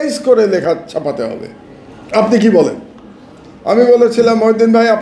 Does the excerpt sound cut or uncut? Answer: uncut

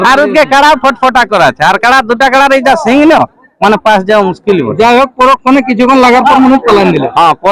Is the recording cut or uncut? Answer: uncut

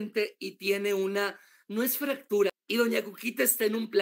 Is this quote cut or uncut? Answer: cut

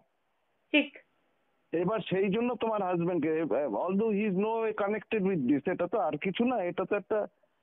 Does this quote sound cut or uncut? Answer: uncut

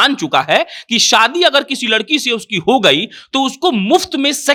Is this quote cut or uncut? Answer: uncut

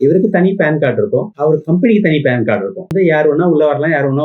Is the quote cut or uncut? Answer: cut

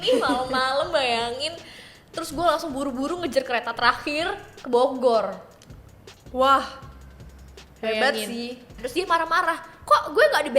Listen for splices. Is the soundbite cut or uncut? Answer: cut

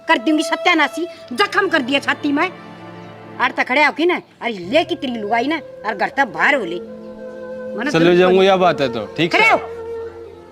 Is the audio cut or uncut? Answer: cut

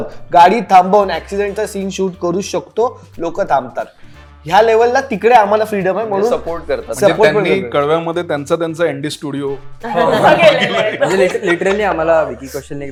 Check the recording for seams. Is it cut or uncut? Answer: uncut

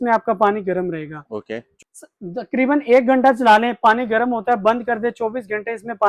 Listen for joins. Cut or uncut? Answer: cut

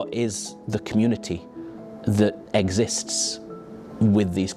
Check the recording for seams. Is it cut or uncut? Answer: uncut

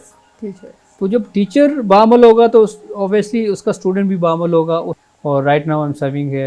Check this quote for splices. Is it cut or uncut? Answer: cut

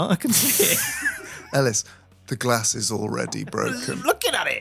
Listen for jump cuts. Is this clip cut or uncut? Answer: cut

